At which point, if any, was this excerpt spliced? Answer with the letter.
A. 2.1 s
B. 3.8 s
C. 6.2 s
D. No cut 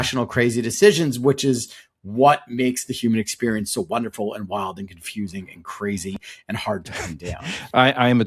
D